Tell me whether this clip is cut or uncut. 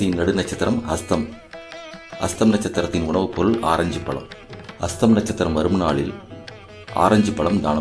uncut